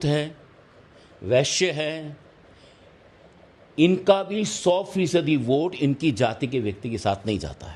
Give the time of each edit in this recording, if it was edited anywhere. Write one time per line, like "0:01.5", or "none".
none